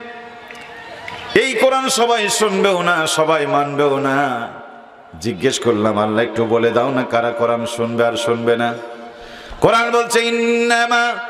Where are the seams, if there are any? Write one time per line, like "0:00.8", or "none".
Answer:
none